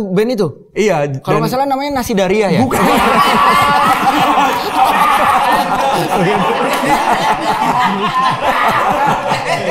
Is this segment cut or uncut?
uncut